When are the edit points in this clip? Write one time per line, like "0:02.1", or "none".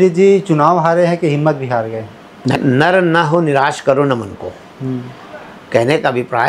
0:02.6